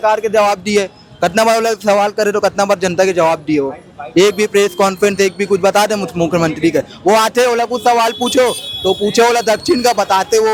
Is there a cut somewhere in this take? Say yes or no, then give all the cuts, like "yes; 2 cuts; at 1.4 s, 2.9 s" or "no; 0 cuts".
no; 0 cuts